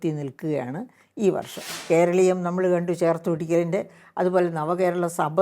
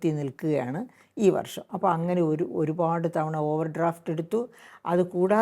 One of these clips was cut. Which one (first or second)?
first